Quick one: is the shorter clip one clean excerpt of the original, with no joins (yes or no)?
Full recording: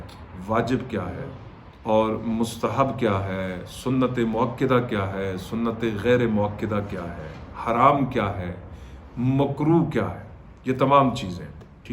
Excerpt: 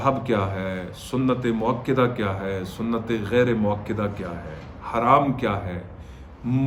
yes